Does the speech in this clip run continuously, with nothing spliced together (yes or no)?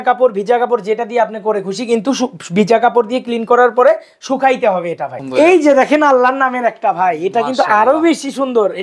no